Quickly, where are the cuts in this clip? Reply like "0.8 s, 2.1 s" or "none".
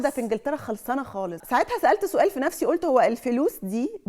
1.4 s

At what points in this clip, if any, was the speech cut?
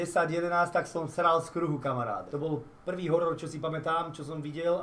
2.3 s

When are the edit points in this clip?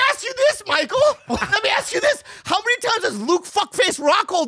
none

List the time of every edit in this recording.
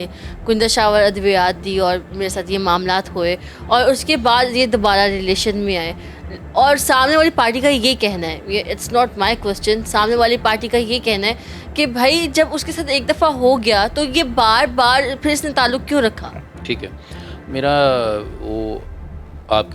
none

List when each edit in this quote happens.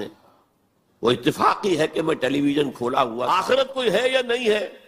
3.2 s

